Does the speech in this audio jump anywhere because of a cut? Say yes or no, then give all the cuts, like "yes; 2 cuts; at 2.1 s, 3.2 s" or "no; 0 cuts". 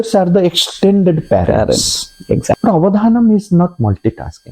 yes; 1 cut; at 2.6 s